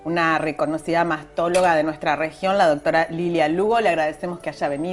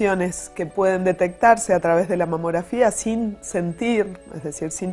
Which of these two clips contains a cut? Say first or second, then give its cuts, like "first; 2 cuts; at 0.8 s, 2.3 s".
second; 1 cut; at 2.1 s